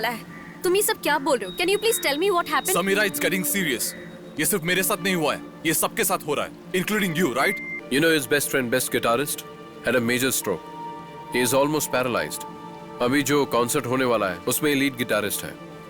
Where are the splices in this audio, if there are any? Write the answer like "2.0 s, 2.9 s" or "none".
7.7 s

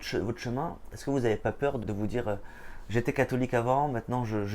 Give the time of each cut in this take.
1.8 s

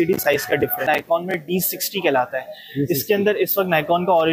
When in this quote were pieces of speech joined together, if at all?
1.0 s

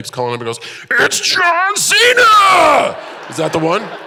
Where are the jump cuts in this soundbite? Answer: none

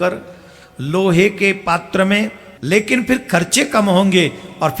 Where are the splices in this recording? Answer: 2.5 s

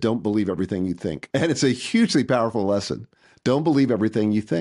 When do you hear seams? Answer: 1.2 s

